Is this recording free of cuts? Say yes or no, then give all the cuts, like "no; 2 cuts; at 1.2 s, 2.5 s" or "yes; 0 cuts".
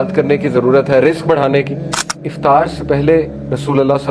no; 1 cut; at 2.2 s